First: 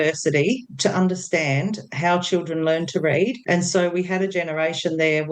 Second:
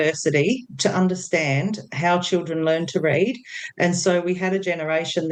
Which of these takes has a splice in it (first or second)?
first